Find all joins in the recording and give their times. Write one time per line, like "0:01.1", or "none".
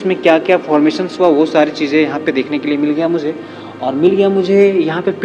none